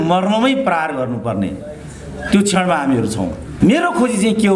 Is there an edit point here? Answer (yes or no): yes